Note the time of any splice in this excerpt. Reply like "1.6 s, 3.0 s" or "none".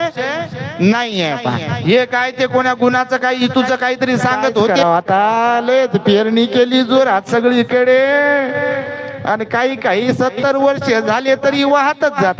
4.7 s